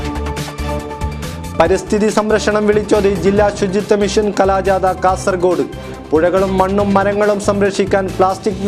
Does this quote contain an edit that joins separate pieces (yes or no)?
yes